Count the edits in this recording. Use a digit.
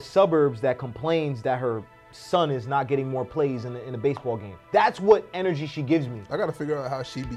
0